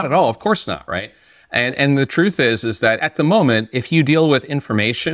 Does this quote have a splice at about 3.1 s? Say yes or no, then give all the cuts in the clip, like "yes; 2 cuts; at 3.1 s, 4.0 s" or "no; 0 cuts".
yes; 1 cut; at 3.1 s